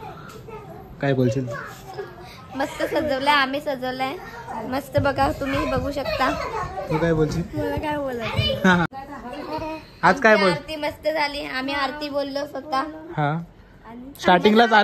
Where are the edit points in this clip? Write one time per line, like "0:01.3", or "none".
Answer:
0:08.9